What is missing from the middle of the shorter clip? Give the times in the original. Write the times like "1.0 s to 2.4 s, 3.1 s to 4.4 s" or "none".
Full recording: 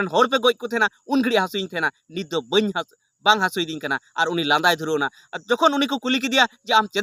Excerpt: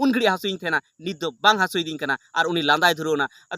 2.4 s to 3.1 s